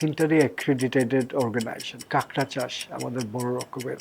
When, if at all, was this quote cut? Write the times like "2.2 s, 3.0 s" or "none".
2.1 s

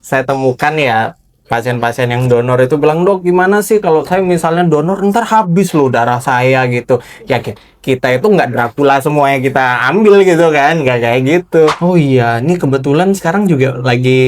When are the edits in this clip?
11.8 s

